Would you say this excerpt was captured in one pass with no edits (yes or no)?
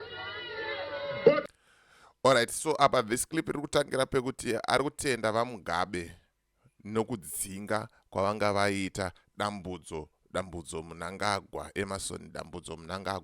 no